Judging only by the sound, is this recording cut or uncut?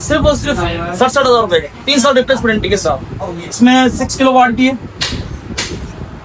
uncut